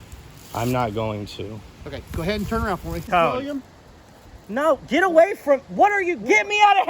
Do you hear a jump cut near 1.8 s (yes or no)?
no